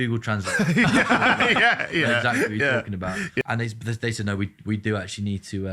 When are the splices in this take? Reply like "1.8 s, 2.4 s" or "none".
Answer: 3.4 s

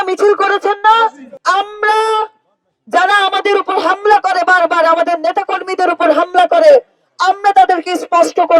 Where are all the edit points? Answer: 1.3 s

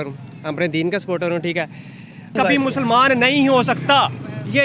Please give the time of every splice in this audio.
2.4 s

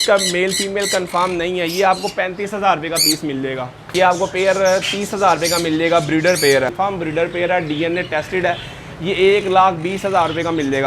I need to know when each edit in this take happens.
3.8 s, 6.7 s

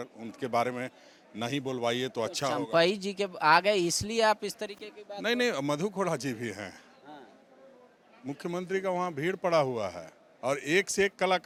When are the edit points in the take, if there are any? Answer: none

